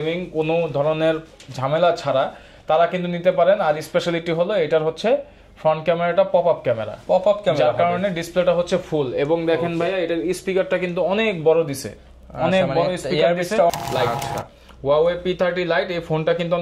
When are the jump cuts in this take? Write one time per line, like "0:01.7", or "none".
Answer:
0:13.7